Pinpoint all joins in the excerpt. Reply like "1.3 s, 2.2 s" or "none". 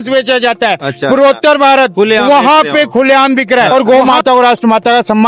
3.7 s